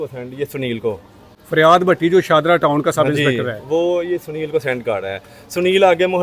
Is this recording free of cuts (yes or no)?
yes